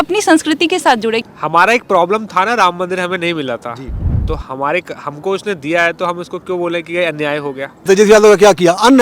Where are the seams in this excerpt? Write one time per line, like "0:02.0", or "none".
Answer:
0:01.3
0:07.9

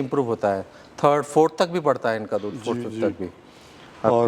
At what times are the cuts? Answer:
none

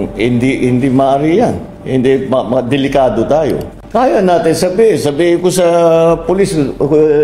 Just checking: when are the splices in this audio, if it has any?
0:03.7

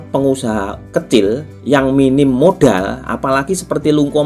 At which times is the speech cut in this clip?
0:01.5

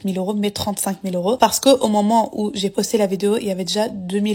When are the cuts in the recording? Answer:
0:01.4

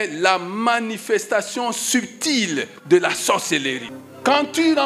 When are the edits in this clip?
0:03.8

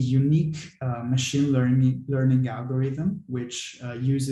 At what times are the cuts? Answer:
none

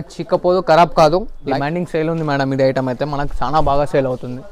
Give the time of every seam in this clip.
0:01.3

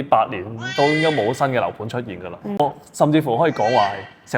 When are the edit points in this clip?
0:02.6

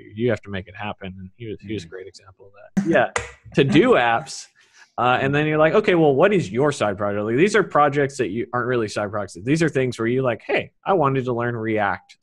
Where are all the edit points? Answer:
0:02.6

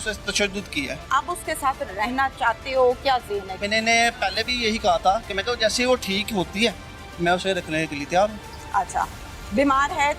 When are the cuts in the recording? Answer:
0:01.0
0:03.6

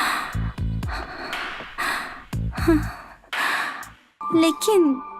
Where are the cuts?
0:04.1

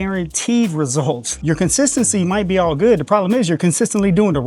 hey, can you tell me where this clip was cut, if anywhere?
0:01.3

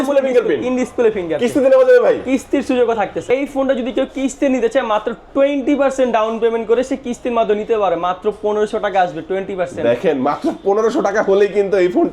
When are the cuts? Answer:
0:03.3

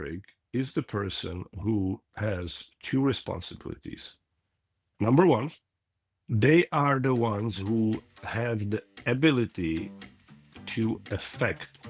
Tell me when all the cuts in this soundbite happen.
none

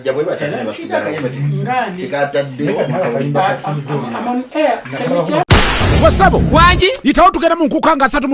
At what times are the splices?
0:05.5

